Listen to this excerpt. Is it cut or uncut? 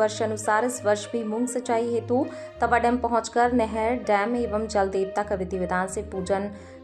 uncut